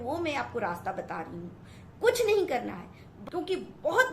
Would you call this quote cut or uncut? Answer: cut